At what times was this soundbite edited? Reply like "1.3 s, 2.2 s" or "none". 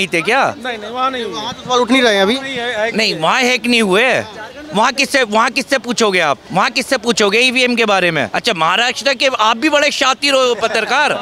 6.4 s, 8.3 s